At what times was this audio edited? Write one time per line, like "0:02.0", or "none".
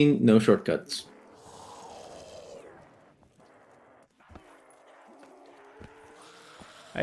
none